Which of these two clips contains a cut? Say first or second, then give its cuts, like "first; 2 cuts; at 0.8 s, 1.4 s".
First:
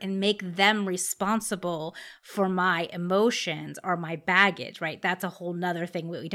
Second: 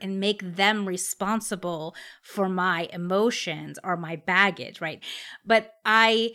second; 1 cut; at 5.0 s